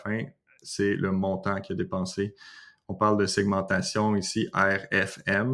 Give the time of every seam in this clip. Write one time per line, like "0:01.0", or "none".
none